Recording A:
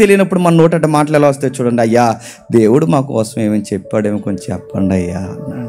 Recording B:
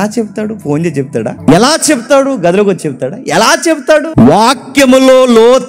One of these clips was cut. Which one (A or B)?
B